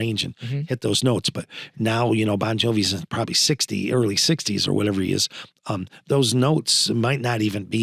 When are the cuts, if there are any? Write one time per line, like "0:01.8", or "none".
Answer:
none